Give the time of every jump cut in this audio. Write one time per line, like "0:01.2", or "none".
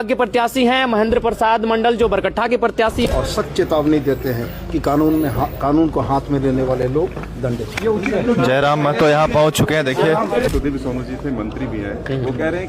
0:03.1
0:10.5